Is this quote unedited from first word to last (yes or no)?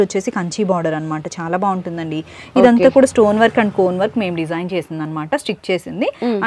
yes